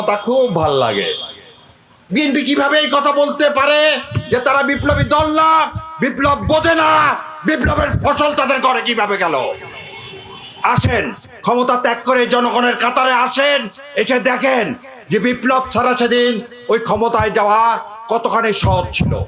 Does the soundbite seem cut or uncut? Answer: uncut